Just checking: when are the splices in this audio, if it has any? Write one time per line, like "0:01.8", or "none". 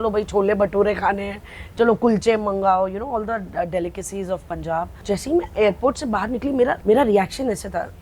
0:04.9
0:06.8